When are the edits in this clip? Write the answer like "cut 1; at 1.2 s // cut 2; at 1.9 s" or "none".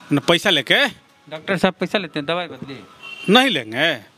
none